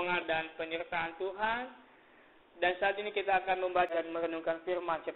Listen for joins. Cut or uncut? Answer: cut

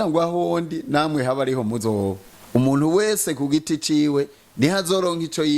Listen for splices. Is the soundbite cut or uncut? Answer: cut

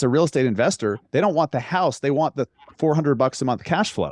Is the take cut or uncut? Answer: uncut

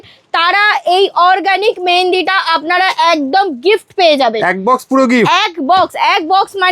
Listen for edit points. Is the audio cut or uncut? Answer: uncut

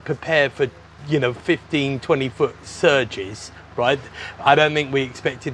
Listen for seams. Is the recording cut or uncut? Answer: uncut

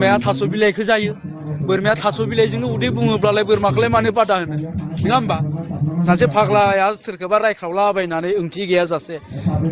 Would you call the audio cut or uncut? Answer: uncut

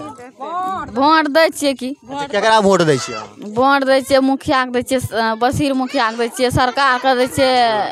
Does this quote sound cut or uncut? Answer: uncut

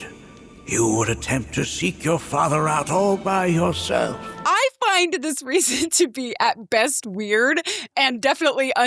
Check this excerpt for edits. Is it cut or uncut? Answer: cut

